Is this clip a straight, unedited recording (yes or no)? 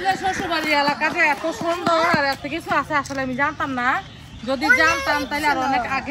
yes